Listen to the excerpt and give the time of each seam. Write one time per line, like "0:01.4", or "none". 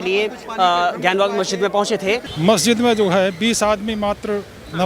0:02.3